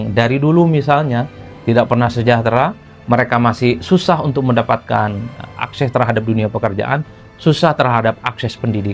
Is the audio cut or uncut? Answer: uncut